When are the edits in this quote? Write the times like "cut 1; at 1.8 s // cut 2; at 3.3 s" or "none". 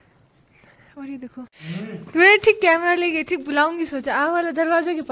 cut 1; at 1.6 s